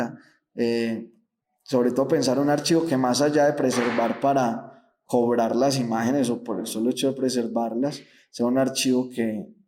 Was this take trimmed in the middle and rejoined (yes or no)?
no